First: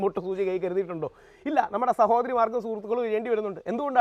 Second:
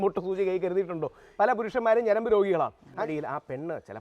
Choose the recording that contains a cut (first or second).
second